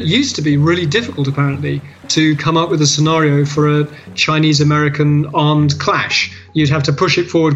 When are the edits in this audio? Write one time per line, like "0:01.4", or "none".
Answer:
none